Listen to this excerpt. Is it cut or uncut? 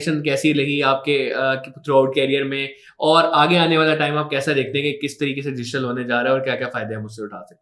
uncut